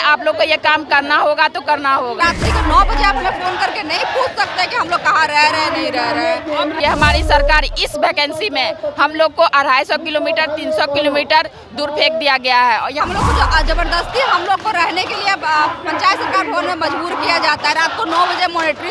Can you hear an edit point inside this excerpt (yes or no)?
yes